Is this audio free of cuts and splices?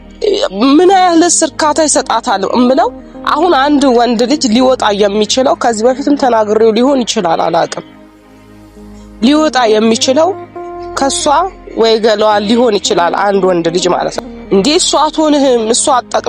no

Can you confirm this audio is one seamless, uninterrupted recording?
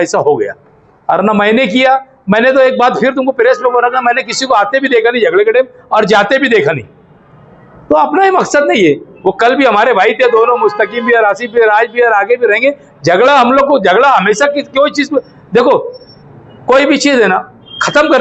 yes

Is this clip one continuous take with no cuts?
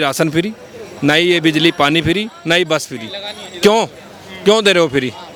yes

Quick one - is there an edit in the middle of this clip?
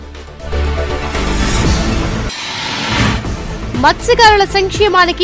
yes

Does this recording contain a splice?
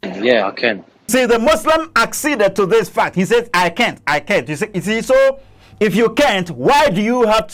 no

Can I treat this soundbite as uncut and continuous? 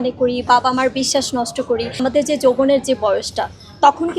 no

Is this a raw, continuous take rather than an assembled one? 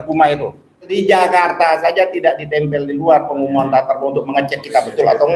no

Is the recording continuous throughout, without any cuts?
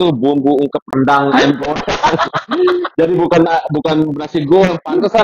yes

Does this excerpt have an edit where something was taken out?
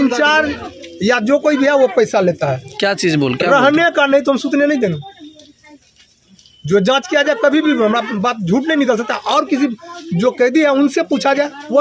no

